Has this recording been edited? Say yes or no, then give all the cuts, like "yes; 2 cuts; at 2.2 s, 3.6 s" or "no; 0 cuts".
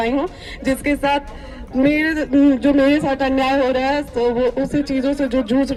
no; 0 cuts